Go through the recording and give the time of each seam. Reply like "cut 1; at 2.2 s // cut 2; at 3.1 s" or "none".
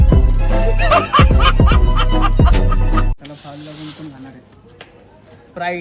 cut 1; at 3.2 s